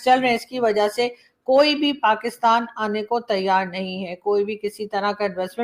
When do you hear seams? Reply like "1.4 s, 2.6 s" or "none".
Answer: none